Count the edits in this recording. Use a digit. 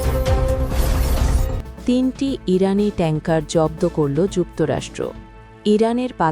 1